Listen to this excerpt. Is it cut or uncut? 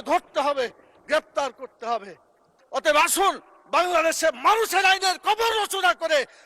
cut